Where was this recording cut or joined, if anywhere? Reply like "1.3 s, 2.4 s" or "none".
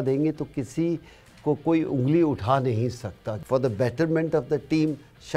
3.3 s